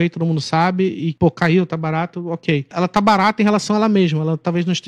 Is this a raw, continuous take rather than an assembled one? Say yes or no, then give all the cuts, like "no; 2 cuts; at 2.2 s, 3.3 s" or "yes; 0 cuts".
no; 2 cuts; at 1.1 s, 2.7 s